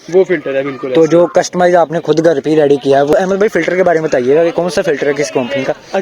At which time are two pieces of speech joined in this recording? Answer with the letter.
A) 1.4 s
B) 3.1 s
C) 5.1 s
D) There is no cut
B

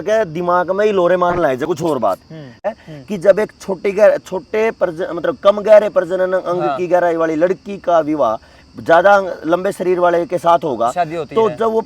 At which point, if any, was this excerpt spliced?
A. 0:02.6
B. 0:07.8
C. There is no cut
A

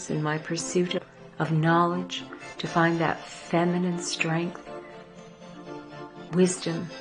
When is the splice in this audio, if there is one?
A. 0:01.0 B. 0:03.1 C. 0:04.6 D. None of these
A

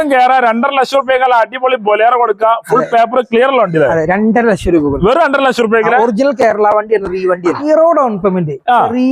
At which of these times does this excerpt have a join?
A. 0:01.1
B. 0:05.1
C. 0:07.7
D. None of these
C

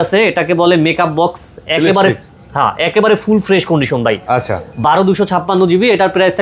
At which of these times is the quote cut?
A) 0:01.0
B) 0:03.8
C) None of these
C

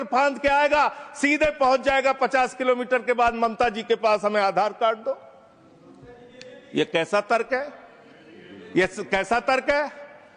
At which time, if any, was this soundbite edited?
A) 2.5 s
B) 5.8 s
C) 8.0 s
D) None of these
D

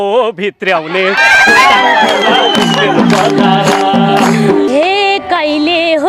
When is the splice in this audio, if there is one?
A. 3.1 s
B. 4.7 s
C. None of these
B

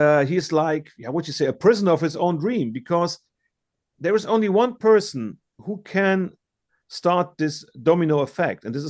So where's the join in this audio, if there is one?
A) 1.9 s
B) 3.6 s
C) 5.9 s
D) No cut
D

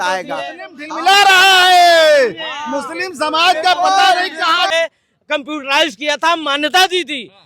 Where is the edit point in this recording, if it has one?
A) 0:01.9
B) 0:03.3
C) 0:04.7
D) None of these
C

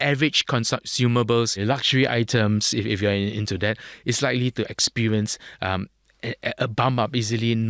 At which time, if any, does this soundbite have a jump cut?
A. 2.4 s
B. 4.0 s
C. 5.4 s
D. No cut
D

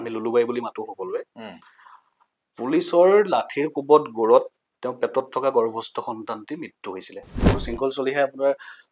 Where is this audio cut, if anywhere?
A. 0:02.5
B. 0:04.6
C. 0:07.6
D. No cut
C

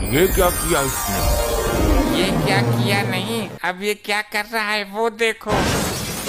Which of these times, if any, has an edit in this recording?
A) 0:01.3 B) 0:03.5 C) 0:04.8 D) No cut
D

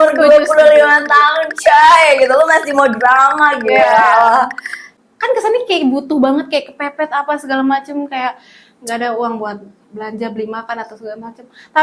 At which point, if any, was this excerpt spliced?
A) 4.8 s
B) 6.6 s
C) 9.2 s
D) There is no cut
A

